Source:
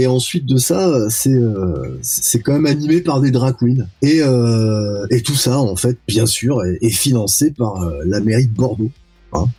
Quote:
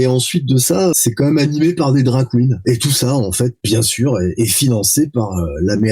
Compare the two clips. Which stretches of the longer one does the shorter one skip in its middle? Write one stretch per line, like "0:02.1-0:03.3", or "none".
0:00.9-0:02.2
0:03.8-0:05.0